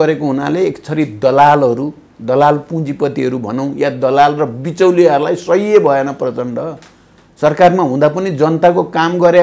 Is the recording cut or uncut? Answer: uncut